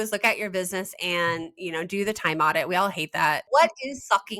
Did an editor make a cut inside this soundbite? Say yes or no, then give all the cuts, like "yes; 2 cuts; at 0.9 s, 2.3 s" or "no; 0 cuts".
yes; 1 cut; at 3.4 s